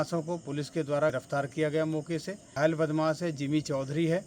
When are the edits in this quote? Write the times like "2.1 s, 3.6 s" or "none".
1.1 s, 2.5 s